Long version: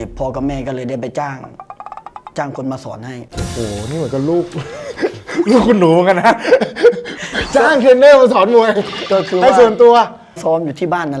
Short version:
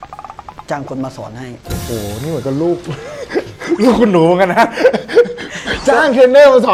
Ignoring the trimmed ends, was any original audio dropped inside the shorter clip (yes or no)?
no